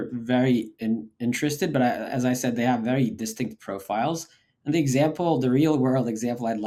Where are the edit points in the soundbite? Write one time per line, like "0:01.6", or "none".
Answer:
none